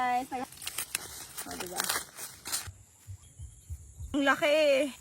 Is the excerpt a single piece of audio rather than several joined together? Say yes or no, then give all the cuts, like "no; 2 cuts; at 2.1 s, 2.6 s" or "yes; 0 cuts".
no; 2 cuts; at 2.7 s, 4.1 s